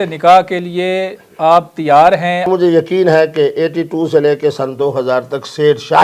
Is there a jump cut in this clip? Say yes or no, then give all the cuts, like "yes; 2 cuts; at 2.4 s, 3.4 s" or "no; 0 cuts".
yes; 1 cut; at 2.5 s